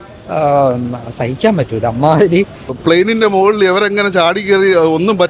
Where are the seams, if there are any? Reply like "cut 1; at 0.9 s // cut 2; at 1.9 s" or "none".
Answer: cut 1; at 2.8 s